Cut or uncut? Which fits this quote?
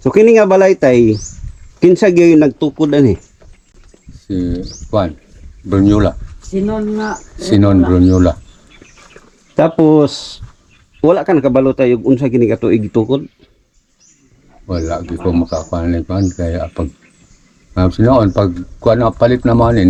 uncut